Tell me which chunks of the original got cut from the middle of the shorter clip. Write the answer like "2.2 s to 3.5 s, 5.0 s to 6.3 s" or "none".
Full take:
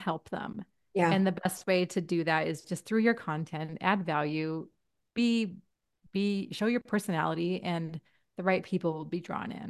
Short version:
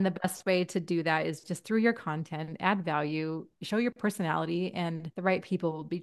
4.8 s to 6.5 s, 8.0 s to 8.3 s